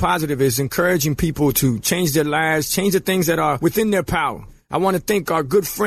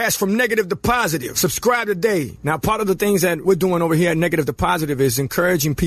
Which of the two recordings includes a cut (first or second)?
second